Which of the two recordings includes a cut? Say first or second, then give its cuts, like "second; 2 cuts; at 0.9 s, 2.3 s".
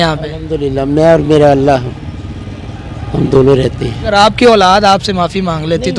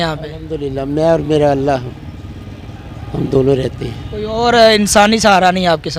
first; 1 cut; at 3.9 s